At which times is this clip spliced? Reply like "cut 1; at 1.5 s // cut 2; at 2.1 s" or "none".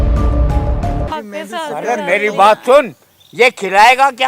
cut 1; at 1.1 s